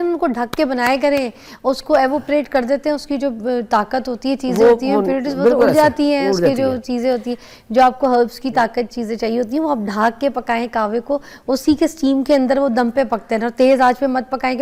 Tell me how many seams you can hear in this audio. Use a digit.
0